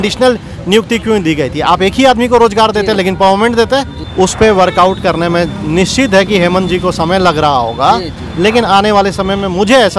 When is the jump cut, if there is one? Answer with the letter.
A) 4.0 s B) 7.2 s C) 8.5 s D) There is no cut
A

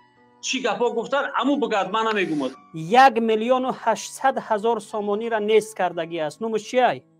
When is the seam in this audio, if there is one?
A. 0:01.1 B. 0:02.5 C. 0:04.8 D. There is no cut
B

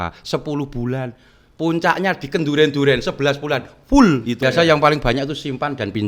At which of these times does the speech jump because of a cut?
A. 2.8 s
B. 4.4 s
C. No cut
B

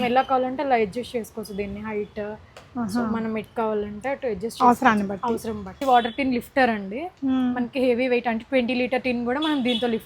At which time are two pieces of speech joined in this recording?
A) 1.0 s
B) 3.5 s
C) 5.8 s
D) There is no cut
C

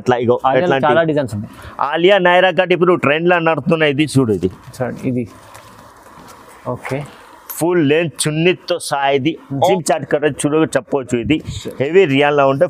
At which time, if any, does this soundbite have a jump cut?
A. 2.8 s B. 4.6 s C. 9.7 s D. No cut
C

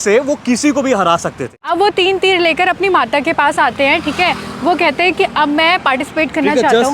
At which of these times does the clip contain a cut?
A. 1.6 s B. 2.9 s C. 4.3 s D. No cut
A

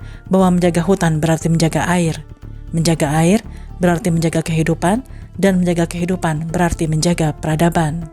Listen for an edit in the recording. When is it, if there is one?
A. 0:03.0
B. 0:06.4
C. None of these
C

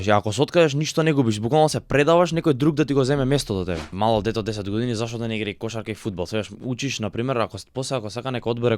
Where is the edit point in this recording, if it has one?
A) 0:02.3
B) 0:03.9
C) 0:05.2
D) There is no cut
B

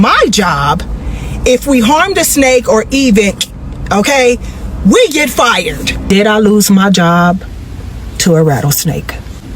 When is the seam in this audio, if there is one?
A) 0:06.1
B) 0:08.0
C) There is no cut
A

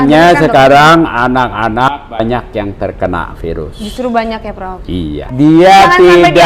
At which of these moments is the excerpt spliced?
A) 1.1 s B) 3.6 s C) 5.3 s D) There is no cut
C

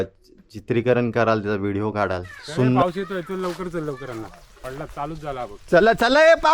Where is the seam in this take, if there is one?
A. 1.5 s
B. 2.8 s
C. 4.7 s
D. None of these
B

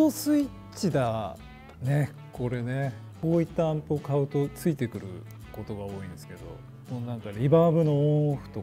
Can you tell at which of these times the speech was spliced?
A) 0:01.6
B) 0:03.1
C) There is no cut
B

